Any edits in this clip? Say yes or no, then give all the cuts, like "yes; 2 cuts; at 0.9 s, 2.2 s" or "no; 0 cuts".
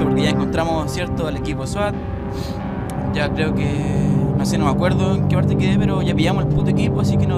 yes; 1 cut; at 4.1 s